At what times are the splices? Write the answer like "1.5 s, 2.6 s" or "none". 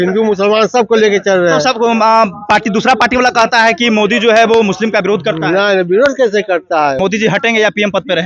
7.0 s